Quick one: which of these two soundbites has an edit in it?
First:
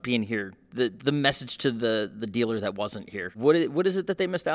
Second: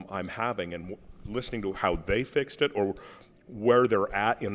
first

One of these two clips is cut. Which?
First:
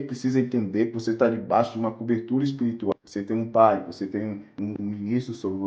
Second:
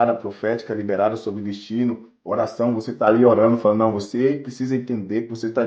first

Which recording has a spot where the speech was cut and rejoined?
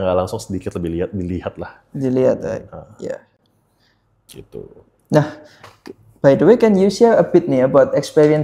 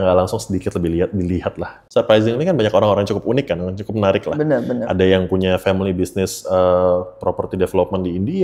second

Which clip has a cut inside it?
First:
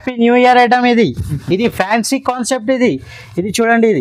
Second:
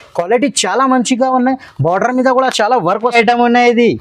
second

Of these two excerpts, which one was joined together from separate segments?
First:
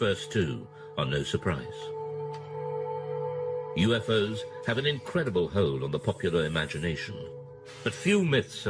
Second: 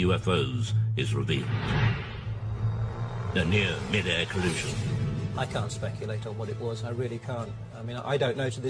first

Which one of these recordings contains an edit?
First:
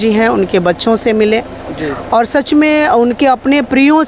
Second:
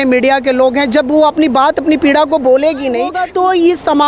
second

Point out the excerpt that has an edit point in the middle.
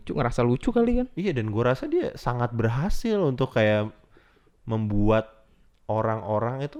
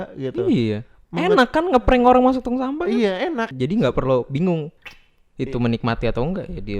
second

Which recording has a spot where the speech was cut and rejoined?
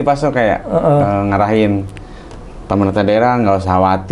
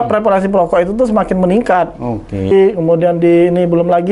second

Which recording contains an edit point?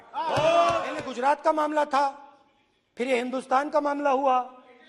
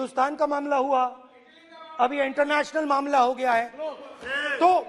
first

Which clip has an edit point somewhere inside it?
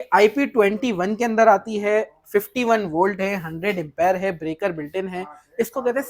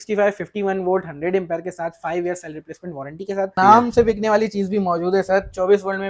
second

